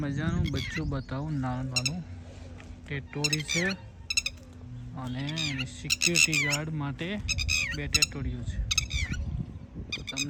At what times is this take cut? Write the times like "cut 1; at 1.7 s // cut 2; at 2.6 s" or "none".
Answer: none